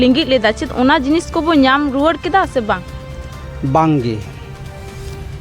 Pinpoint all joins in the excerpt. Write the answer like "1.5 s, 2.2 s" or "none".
none